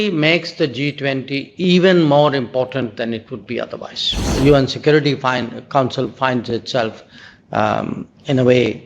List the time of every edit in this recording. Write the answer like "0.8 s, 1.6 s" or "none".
4.3 s

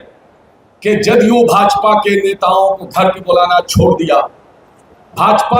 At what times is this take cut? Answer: none

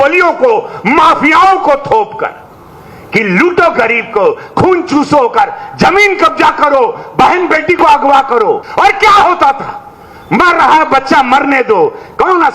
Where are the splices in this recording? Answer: 8.7 s

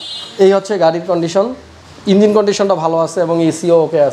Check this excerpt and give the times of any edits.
none

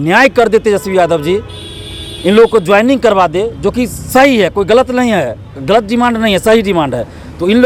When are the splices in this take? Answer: none

